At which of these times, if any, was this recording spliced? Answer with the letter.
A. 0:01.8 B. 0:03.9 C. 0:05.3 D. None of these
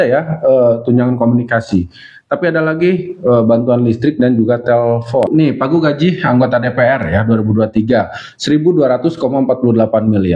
C